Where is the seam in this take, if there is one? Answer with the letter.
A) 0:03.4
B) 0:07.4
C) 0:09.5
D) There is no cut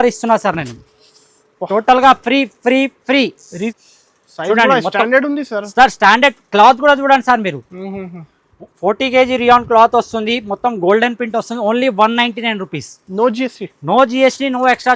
A